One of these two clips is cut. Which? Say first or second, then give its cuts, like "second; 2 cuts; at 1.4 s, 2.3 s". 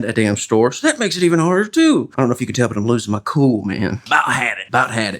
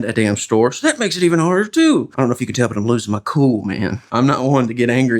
first; 1 cut; at 4.0 s